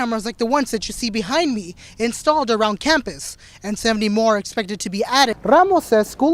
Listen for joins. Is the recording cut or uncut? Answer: cut